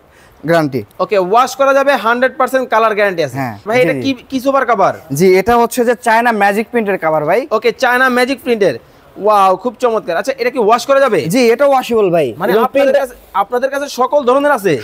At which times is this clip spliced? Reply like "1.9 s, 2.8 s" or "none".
3.7 s

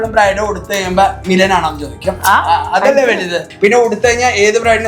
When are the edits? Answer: 3.4 s

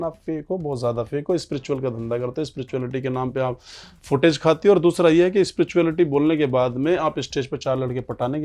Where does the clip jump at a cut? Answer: none

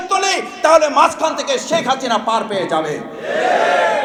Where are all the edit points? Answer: none

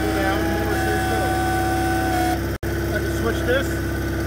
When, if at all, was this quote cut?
2.6 s

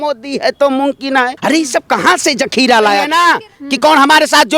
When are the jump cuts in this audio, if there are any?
1.3 s, 3.1 s

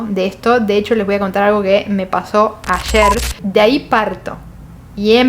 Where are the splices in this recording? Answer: 3.4 s

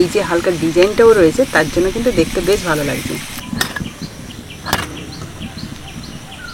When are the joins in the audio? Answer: 3.4 s

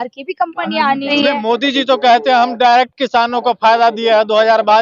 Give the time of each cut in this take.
1.1 s

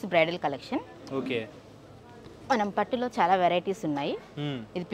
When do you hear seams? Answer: none

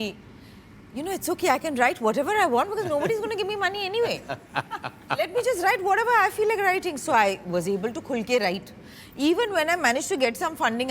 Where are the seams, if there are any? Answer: none

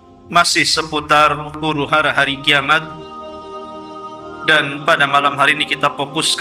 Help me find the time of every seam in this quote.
2.8 s, 4.4 s

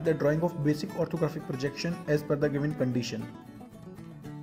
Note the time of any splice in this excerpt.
3.3 s

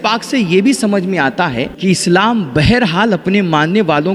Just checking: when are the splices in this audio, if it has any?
1.7 s

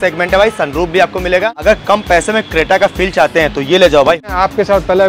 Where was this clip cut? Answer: 1.6 s, 4.3 s

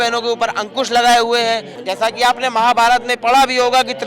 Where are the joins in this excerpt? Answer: 1.7 s

